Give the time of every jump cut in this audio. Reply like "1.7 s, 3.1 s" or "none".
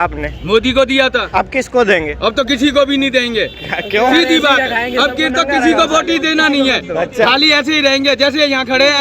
none